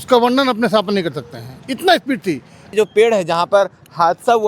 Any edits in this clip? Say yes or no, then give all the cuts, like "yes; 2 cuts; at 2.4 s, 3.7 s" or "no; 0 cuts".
yes; 1 cut; at 2.7 s